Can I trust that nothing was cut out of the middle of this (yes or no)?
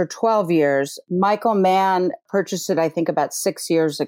no